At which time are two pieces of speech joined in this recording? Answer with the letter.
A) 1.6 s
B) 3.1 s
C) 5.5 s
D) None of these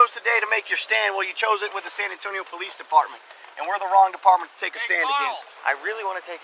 C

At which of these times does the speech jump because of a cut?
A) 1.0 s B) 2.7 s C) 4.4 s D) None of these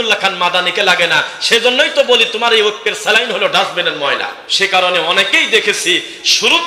C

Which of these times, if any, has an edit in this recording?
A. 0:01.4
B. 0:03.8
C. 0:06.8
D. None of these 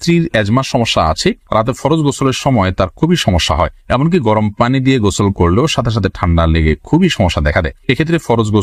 D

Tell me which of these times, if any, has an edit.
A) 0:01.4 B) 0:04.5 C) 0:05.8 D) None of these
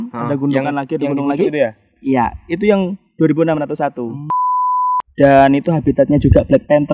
B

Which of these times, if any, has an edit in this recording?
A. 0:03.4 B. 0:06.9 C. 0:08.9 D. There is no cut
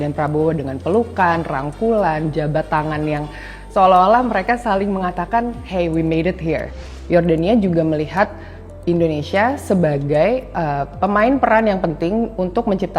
B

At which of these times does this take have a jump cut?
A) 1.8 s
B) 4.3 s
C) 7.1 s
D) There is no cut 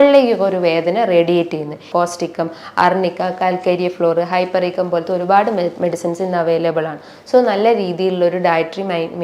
A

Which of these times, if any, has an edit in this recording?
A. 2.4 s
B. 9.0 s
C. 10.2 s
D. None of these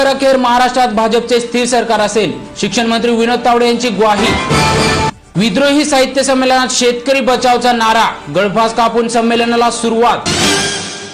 C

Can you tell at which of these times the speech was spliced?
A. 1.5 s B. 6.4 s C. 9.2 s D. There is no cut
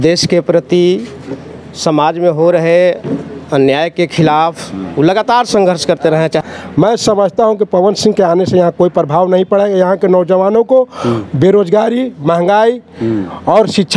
B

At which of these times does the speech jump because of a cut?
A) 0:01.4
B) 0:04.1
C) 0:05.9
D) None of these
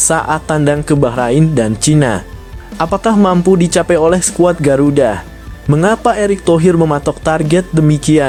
D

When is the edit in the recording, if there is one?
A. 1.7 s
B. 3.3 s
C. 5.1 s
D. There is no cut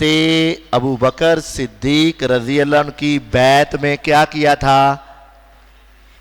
D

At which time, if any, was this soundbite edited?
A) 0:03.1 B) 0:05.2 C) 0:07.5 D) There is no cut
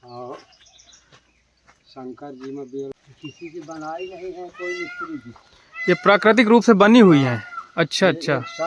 A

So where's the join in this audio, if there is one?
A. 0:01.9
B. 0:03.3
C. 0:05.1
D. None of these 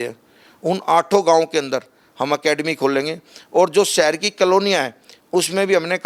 D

